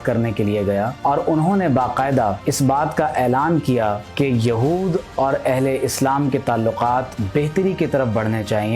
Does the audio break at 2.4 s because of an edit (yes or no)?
yes